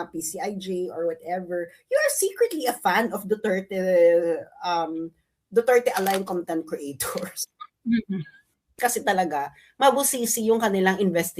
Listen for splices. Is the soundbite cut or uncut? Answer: cut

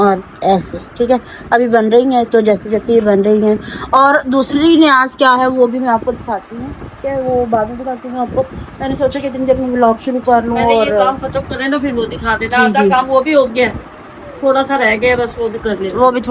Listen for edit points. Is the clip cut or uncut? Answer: uncut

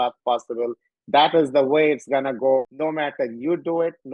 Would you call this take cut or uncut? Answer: cut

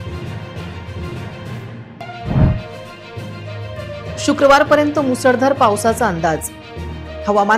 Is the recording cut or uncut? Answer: cut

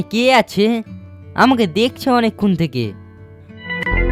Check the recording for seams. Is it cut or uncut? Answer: uncut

